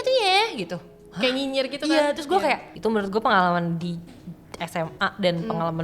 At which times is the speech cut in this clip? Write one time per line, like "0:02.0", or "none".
0:02.7

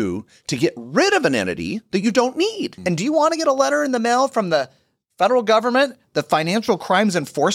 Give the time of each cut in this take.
0:02.7

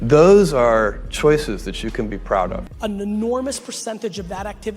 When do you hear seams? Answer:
0:02.7

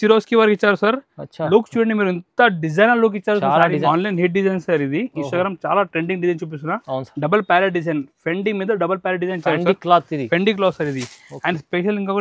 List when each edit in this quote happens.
0:03.8

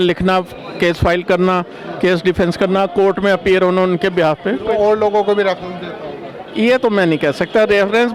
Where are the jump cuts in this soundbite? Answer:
none

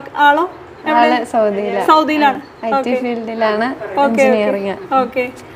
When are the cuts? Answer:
none

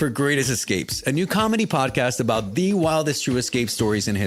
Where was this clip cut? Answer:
none

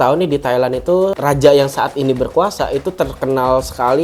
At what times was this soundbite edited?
0:01.1

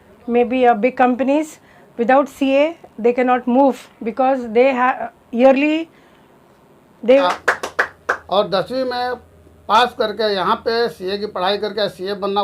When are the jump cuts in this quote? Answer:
0:07.3

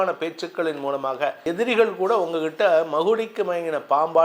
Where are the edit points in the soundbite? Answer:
0:01.4

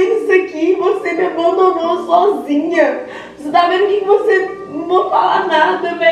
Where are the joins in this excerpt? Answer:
none

